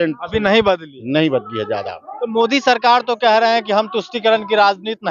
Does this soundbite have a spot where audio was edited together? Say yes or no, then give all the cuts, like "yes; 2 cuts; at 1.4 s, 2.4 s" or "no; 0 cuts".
no; 0 cuts